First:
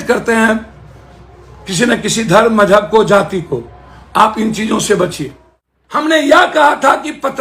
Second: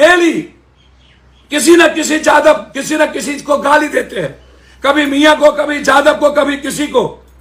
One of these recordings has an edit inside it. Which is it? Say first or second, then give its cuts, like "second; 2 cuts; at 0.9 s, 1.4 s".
first; 1 cut; at 6.0 s